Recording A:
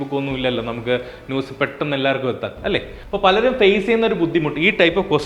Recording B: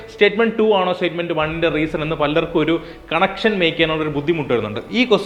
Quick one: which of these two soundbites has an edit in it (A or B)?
A